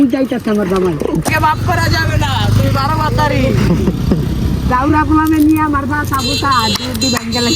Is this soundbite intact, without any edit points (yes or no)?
no